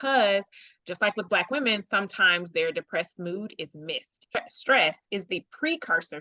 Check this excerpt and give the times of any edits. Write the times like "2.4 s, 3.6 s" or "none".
4.3 s